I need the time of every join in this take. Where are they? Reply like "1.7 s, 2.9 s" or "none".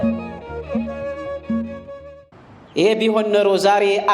2.1 s